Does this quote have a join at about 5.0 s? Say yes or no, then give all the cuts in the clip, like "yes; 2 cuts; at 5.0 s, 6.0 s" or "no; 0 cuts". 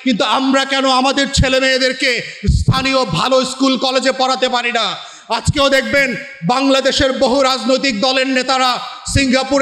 no; 0 cuts